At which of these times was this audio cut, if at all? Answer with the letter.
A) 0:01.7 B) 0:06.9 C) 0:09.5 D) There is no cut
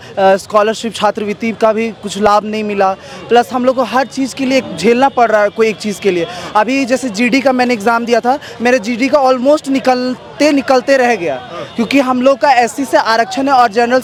D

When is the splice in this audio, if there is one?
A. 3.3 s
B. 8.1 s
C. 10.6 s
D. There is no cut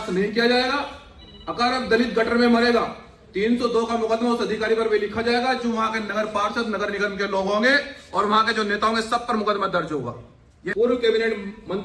C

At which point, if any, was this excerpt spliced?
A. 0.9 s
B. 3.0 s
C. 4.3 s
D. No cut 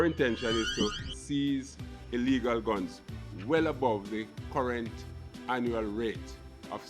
D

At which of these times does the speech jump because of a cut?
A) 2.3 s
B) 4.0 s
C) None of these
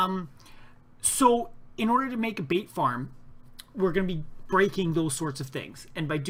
C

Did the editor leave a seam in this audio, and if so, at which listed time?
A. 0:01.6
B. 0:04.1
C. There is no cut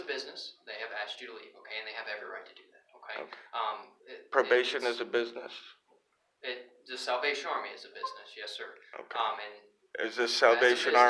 C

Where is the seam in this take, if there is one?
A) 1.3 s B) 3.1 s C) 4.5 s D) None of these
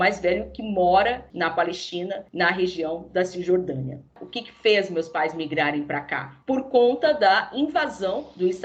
D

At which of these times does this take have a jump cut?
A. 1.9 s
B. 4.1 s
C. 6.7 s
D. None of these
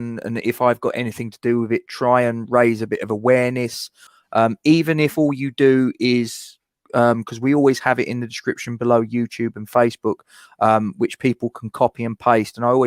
B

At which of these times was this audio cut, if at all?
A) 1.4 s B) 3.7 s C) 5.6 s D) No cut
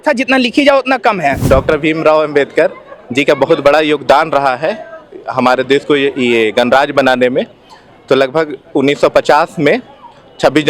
A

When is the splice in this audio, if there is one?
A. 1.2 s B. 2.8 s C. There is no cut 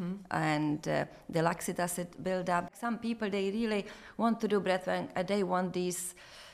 B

